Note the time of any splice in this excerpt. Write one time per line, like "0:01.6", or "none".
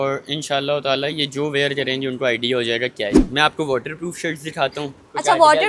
0:03.2